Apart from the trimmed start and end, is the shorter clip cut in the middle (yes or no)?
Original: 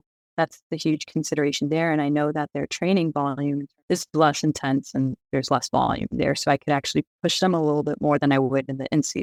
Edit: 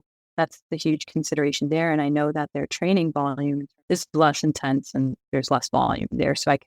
no